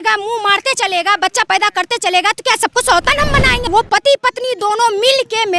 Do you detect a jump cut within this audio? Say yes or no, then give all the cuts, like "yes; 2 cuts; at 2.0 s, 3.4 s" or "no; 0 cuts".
yes; 1 cut; at 3.7 s